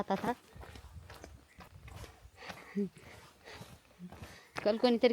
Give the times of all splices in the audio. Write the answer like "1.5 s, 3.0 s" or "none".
1.7 s